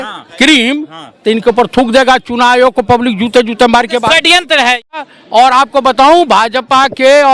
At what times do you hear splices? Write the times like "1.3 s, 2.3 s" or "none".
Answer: 4.8 s